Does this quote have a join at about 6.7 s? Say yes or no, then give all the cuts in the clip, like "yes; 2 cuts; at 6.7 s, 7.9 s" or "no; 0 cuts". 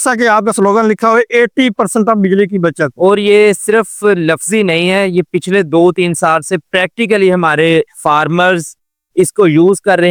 no; 0 cuts